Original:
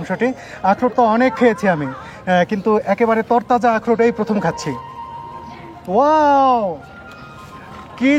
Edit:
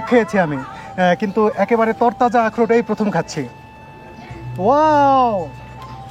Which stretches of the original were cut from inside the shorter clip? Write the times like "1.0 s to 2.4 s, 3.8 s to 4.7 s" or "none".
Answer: none